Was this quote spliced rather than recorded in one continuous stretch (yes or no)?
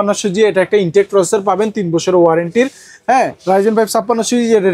no